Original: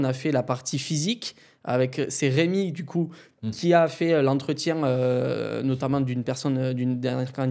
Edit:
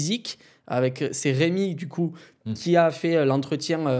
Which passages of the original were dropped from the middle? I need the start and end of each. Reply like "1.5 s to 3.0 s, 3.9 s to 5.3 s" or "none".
none